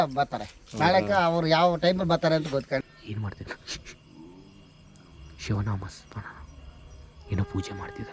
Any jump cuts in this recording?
yes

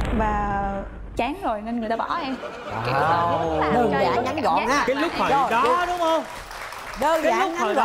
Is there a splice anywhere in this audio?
no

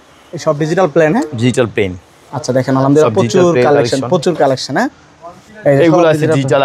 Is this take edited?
no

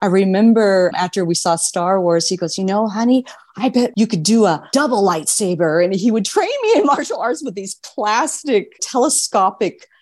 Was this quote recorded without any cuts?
no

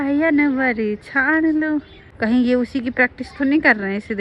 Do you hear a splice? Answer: yes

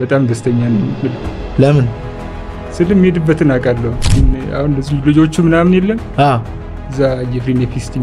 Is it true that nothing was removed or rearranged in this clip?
no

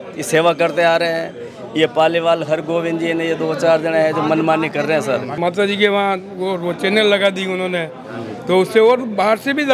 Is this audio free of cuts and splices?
no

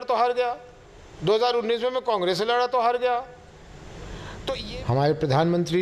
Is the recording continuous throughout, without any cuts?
no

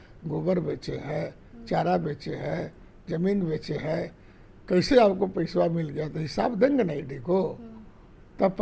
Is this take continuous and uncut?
yes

